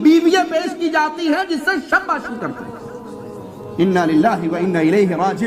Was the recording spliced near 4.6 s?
no; 1 cut; at 3.1 s

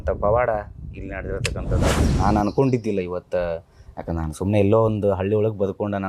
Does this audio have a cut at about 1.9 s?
yes; 1 cut; at 1.9 s

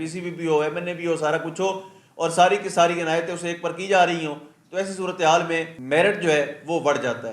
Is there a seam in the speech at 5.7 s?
yes; 1 cut; at 5.7 s

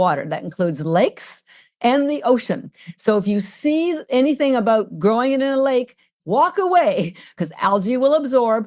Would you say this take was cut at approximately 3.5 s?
no; 2 cuts; at 6.1 s, 7.3 s

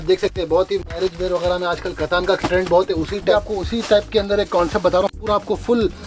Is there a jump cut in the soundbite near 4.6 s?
no; 1 cut; at 3.3 s

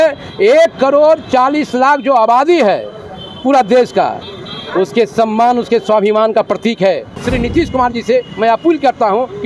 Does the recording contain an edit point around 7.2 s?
yes; 1 cut; at 7.2 s

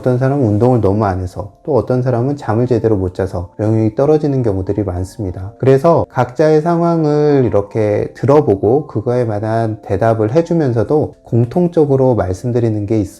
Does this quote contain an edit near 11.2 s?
yes; 1 cut; at 11.2 s

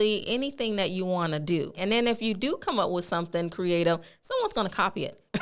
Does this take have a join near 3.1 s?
no; 1 cut; at 1.8 s

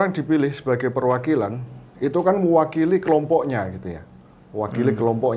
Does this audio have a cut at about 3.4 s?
no; 0 cuts

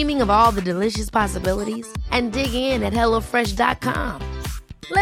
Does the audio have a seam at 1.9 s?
no; 0 cuts

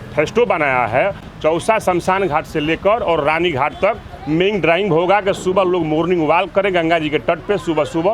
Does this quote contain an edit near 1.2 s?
no; 0 cuts

